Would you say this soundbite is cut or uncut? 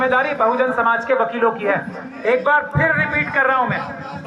uncut